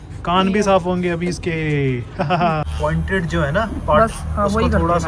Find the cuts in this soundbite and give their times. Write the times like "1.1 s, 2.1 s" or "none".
2.7 s